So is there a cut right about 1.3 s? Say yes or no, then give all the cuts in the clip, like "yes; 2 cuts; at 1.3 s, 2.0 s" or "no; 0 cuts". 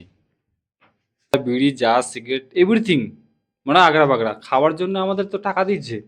yes; 1 cut; at 1.3 s